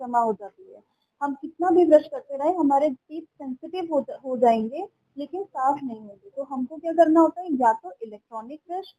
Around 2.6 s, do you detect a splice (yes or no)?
no